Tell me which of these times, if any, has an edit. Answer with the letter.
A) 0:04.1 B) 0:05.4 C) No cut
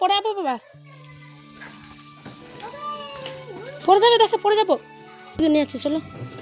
B